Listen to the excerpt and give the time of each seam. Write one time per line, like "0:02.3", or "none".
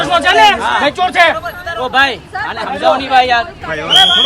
none